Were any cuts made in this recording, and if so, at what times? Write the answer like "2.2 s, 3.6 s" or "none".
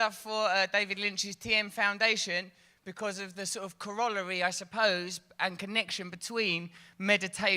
none